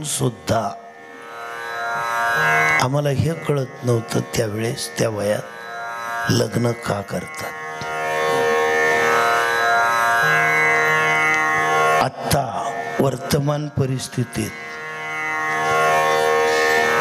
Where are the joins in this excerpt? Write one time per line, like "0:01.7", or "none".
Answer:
none